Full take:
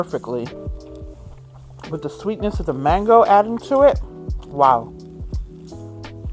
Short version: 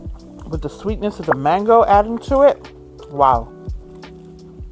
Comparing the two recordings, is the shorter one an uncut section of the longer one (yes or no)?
yes